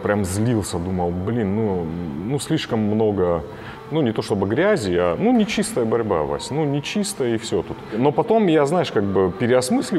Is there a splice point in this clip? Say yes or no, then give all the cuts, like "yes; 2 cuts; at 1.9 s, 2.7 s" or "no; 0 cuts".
no; 0 cuts